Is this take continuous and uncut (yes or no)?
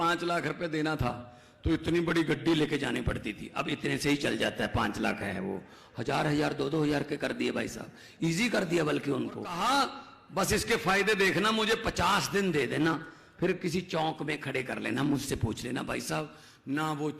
no